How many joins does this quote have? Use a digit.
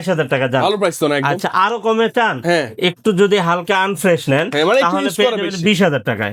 0